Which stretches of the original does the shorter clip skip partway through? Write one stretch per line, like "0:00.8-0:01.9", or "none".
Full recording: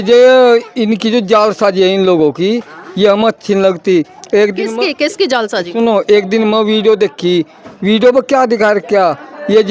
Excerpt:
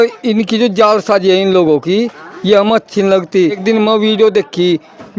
0:04.1-0:06.3